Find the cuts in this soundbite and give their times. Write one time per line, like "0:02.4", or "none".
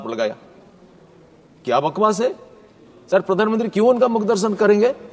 none